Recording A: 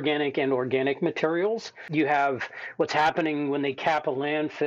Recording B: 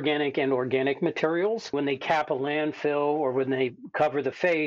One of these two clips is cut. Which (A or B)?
B